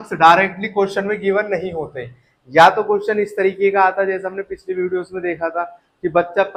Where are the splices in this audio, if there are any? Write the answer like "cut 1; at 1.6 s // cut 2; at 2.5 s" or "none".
none